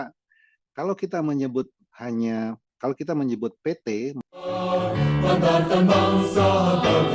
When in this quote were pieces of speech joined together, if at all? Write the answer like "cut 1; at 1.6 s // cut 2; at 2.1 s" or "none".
cut 1; at 4.2 s

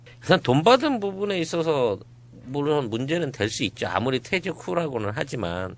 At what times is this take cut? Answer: none

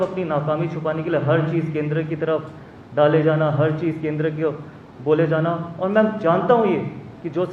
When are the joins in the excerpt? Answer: none

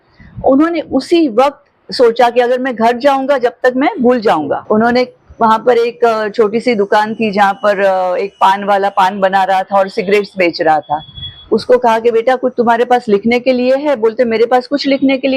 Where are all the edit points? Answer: cut 1; at 4.6 s

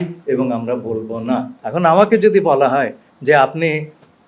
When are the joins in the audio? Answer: cut 1; at 1.6 s

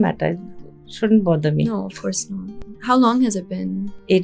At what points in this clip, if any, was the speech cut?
none

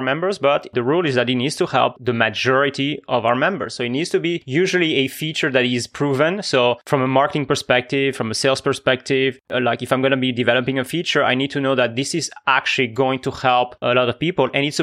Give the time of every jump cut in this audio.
cut 1; at 6.8 s

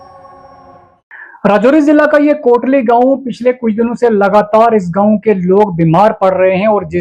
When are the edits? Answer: none

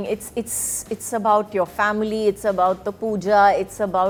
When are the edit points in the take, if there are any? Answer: none

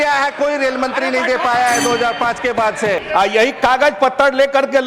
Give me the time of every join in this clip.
cut 1; at 3.0 s

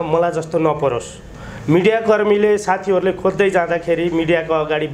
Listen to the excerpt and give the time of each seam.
none

